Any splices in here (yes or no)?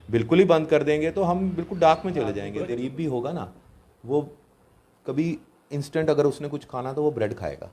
yes